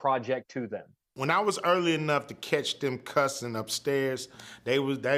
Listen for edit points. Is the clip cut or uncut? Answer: cut